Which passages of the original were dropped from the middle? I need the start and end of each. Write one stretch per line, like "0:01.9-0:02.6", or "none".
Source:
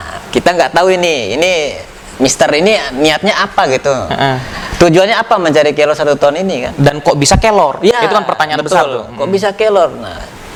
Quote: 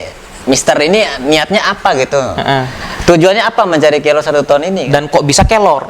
0:06.6-0:06.8